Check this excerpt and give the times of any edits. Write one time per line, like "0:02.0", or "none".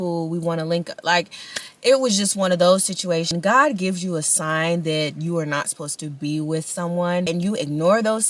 0:03.3
0:07.3